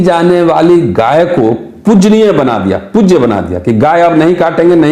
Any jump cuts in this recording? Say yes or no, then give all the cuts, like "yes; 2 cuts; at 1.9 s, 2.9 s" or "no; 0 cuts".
no; 0 cuts